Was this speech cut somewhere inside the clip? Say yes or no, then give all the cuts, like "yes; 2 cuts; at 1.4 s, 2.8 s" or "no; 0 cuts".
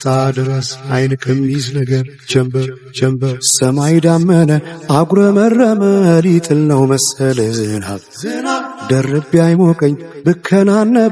yes; 1 cut; at 3.4 s